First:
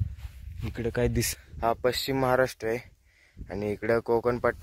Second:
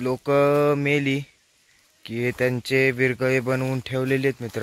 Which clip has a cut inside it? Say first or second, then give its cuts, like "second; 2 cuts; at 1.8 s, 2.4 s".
first; 1 cut; at 1.3 s